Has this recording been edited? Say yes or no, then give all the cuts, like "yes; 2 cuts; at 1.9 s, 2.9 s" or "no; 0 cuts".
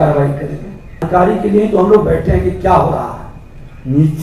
yes; 1 cut; at 1.1 s